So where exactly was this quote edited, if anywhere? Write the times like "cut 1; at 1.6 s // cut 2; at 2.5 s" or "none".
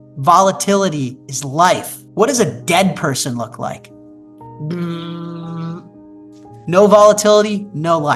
cut 1; at 2.0 s